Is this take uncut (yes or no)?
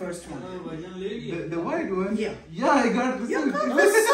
no